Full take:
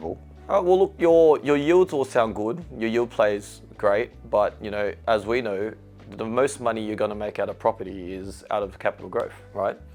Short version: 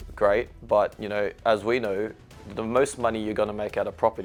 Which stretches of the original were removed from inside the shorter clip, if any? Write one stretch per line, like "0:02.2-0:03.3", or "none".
none